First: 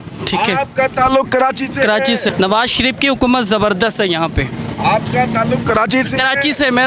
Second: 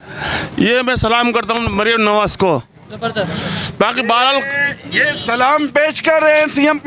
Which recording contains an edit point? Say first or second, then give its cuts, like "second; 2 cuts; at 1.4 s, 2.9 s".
first; 1 cut; at 2.3 s